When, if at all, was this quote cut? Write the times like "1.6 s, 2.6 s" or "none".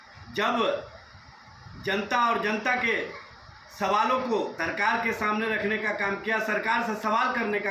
4.6 s